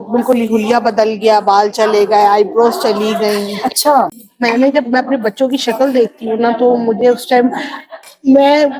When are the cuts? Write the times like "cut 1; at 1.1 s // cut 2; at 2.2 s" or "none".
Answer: cut 1; at 4.2 s